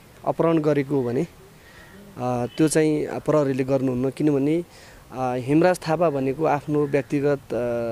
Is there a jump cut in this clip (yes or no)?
no